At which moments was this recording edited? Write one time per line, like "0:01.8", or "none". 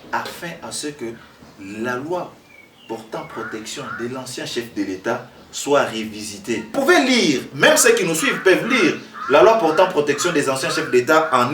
0:06.7